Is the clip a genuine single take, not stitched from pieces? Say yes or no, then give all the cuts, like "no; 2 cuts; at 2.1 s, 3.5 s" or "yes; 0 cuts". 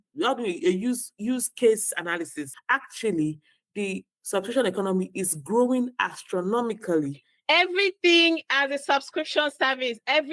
no; 1 cut; at 2.4 s